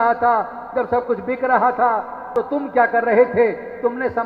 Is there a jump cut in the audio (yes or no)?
yes